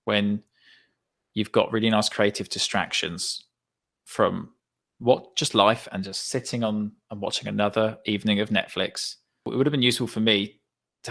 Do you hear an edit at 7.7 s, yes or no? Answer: no